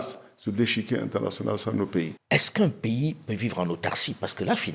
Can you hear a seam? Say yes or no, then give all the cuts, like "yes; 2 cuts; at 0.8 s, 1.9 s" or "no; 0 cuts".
yes; 1 cut; at 2.2 s